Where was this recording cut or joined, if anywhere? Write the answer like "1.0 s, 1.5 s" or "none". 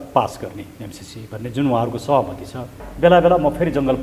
2.8 s